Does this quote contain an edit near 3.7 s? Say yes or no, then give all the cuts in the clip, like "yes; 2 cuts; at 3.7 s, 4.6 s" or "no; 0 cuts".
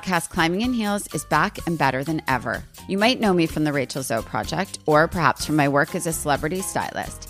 no; 0 cuts